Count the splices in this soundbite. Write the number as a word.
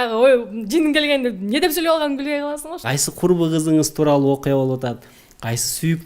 one